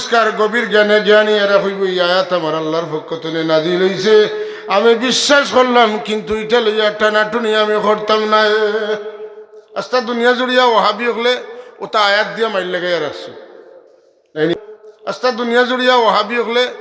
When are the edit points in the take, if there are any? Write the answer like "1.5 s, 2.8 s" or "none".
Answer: 14.6 s